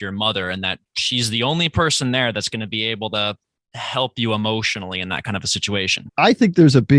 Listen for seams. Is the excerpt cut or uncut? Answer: cut